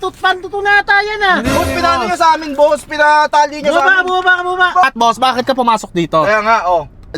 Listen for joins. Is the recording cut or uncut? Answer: cut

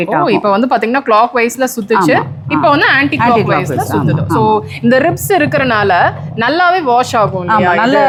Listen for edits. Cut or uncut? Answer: uncut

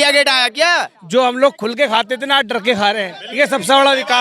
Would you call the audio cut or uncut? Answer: cut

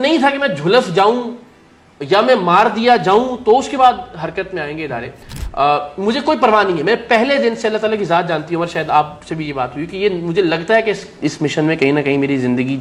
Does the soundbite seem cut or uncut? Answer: uncut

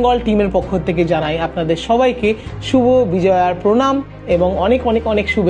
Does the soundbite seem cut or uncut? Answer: uncut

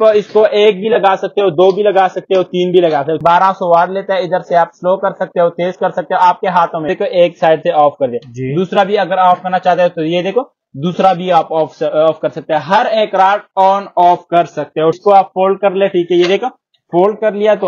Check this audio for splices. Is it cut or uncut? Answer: cut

